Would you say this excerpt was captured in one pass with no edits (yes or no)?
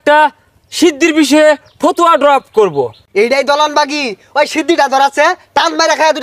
no